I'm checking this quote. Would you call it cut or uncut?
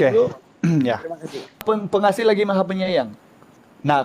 cut